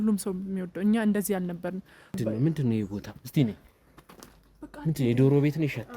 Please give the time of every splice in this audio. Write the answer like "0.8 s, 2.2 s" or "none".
2.2 s